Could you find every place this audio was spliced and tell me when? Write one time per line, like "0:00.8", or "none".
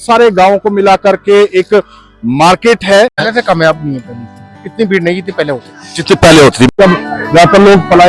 0:03.3
0:06.7